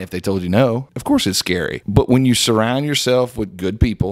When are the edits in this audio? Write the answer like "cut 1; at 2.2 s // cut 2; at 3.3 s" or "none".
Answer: cut 1; at 0.9 s // cut 2; at 1.8 s